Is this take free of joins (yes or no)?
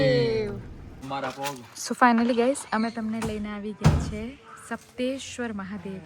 no